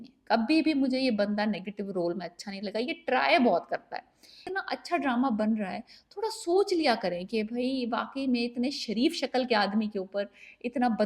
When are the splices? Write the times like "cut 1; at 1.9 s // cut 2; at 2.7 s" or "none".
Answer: cut 1; at 4.5 s